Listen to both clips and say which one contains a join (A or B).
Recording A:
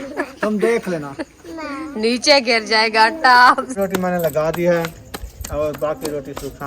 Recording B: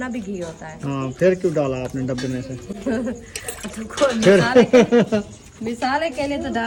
A